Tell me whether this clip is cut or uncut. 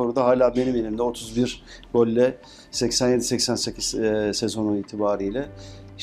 uncut